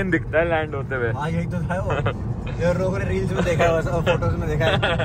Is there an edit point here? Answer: no; 0 cuts

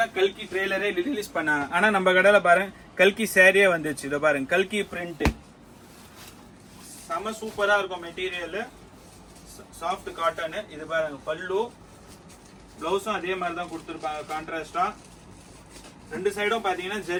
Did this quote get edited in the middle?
no; 0 cuts

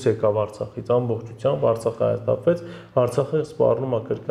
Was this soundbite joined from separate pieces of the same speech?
no; 0 cuts

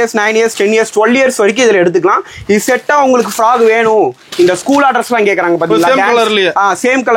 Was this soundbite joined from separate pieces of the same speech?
no; 0 cuts

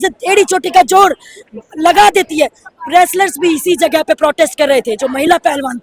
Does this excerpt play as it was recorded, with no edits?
yes; 0 cuts

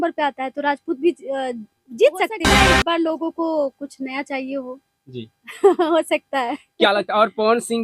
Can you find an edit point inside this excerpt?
yes; 1 cut; at 2.5 s

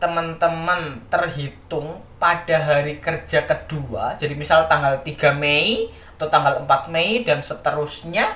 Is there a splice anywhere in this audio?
no; 0 cuts

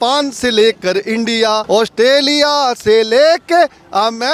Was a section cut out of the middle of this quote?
yes; 1 cut; at 1.6 s

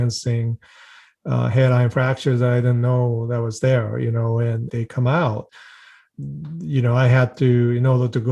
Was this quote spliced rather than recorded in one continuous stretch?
yes; 1 cut; at 5.5 s

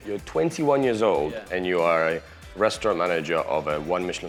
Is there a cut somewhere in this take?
no; 0 cuts

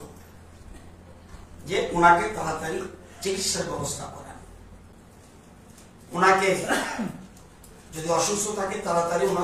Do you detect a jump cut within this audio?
yes; 1 cut; at 4.9 s

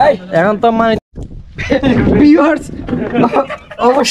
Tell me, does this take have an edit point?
yes; 1 cut; at 1.0 s

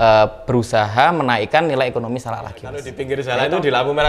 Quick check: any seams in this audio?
yes; 1 cut; at 2.9 s

